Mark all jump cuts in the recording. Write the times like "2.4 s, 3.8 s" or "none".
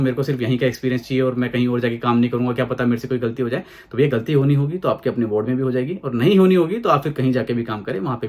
none